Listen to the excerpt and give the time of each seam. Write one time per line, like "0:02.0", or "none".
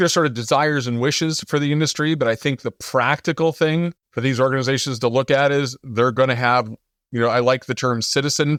none